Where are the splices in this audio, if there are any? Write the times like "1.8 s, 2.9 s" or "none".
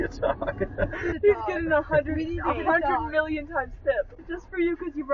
1.1 s, 4.2 s